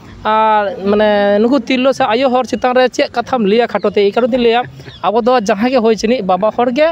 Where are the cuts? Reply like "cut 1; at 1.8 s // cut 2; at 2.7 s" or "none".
none